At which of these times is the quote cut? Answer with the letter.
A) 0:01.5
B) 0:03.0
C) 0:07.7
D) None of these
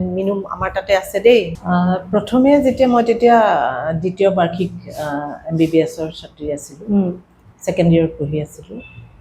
A